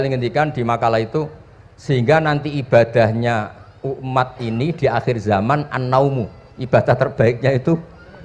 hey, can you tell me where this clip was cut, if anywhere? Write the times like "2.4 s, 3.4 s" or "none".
none